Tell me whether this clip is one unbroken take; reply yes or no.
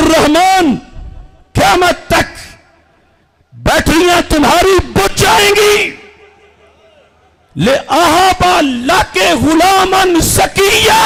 yes